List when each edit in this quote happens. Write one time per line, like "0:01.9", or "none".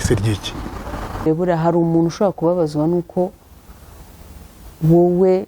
0:01.2